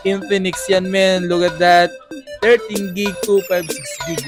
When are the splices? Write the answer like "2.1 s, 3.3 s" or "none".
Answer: none